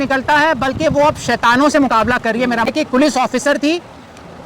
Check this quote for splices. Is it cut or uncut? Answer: cut